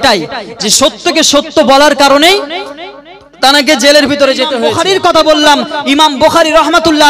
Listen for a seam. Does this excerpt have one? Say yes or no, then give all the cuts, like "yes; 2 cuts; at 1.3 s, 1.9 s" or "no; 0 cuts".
yes; 1 cut; at 4.6 s